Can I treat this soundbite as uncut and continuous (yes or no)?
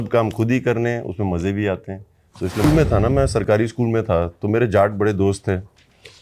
no